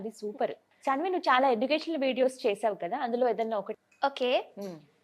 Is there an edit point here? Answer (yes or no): yes